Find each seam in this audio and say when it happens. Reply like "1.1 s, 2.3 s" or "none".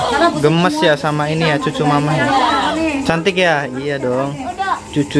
none